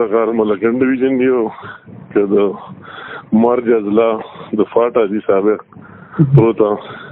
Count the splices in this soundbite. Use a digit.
0